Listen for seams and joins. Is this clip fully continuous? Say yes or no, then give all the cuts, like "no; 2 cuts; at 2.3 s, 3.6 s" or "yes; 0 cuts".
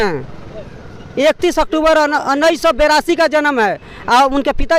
yes; 0 cuts